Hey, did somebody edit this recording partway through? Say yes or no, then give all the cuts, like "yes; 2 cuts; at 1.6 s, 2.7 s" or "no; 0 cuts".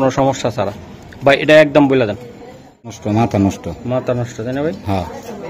yes; 1 cut; at 2.9 s